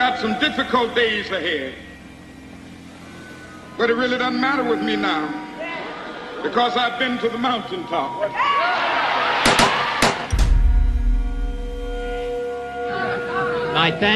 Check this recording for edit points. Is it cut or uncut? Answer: uncut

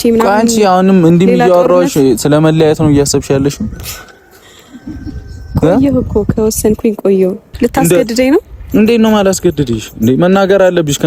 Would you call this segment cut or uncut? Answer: cut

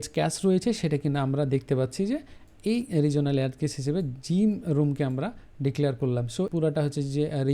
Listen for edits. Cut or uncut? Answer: cut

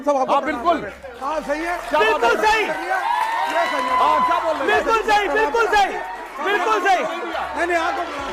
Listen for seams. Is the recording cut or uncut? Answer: uncut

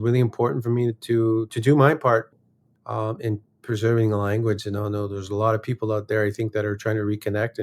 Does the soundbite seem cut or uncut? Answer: cut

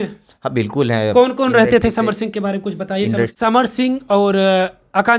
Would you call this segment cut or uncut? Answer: cut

